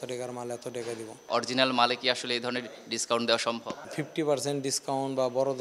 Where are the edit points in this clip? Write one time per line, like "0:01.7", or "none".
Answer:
0:01.3
0:03.8